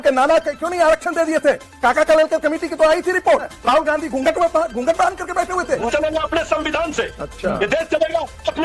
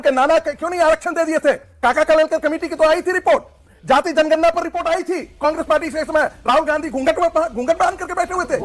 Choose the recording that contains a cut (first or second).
first